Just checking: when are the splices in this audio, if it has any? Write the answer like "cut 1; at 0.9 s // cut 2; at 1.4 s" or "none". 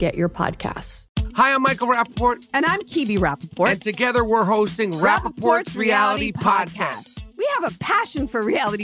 cut 1; at 0.9 s